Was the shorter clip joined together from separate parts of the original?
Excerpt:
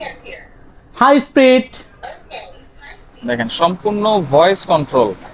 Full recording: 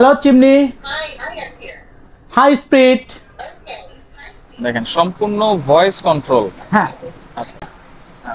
no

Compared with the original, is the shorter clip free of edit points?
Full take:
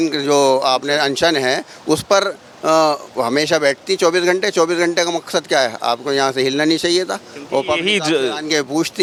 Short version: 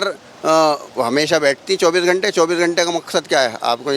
yes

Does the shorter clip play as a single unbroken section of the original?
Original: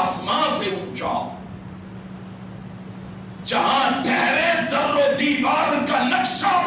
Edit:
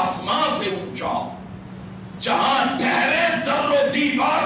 no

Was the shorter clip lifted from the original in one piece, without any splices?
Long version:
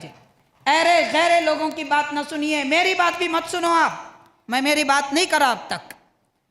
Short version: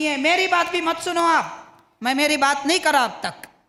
yes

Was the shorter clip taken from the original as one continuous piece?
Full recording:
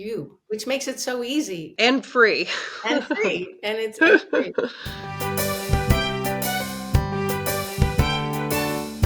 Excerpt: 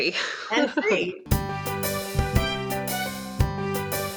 no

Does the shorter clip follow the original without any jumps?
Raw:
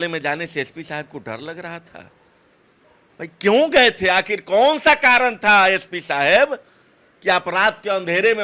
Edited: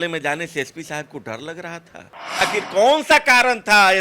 no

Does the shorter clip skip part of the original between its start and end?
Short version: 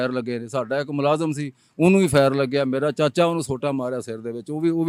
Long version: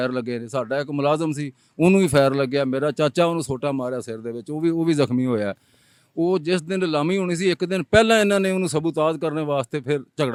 no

